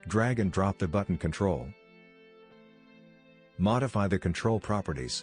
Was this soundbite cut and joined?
yes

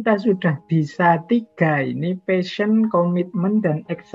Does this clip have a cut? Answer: no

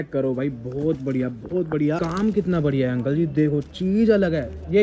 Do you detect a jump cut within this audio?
yes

